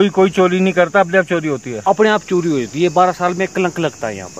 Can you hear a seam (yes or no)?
no